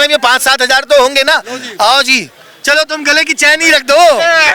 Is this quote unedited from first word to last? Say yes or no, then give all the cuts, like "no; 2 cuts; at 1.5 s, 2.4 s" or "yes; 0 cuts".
yes; 0 cuts